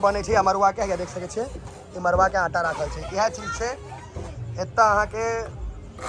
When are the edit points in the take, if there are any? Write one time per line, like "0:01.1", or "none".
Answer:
none